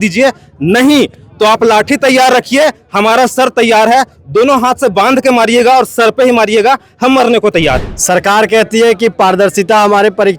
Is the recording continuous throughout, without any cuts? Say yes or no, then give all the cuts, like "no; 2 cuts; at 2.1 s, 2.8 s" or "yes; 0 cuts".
no; 1 cut; at 7.9 s